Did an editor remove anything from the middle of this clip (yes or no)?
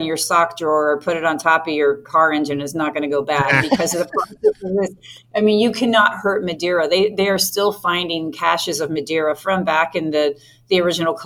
no